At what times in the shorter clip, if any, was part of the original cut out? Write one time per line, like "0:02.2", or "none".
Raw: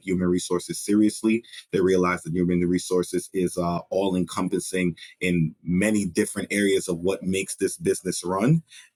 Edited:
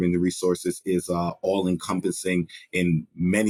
none